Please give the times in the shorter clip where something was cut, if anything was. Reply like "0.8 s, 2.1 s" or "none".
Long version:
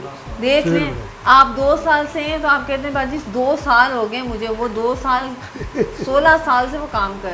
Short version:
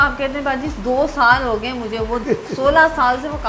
2.2 s